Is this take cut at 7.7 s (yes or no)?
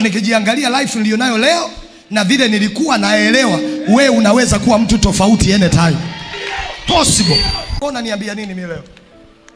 yes